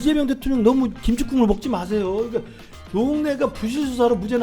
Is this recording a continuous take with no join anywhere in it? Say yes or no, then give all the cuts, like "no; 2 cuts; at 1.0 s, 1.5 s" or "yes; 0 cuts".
no; 1 cut; at 1.0 s